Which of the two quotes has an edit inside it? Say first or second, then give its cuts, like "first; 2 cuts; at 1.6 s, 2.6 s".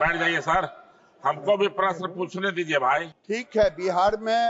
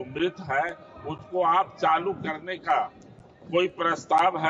first; 1 cut; at 3.1 s